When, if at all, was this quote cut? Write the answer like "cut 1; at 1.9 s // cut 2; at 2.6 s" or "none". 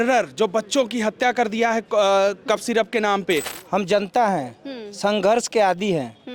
cut 1; at 3.6 s